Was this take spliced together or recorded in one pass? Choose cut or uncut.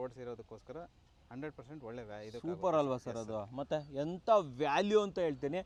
uncut